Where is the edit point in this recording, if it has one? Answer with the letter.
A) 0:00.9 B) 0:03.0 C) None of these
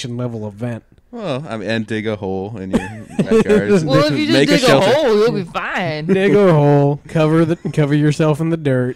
C